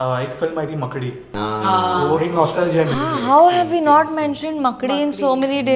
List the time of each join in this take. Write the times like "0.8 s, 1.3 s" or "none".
none

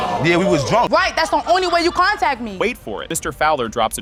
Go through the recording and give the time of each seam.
none

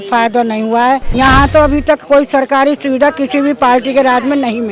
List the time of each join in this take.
1.1 s

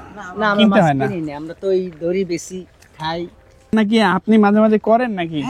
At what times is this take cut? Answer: none

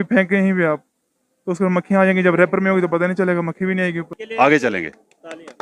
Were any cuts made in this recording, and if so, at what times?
4.2 s

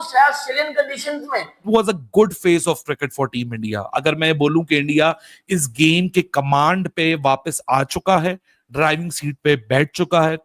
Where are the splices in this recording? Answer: 1.6 s

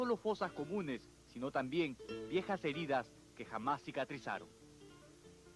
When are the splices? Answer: 2.2 s

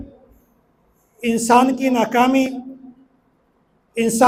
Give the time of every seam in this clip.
none

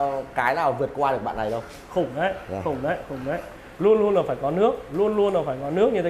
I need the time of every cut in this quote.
3.5 s

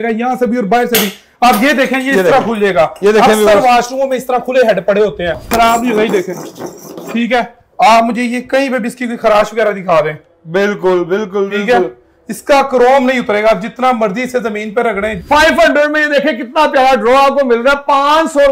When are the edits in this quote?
5.4 s, 15.1 s

